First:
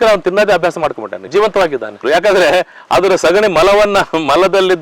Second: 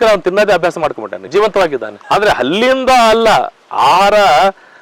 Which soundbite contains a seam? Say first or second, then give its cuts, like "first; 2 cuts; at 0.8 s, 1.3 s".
first; 1 cut; at 1.9 s